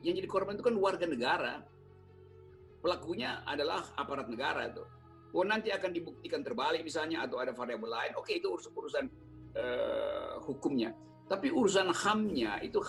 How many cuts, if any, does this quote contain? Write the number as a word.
zero